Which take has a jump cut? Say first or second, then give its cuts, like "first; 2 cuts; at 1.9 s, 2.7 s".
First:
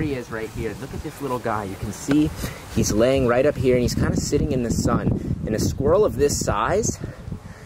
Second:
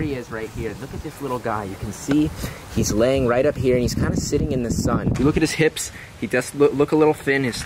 second; 1 cut; at 5.1 s